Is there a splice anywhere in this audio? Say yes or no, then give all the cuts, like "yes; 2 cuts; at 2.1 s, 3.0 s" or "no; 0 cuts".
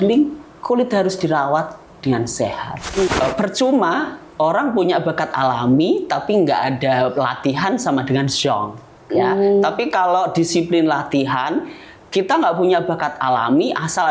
yes; 1 cut; at 3.1 s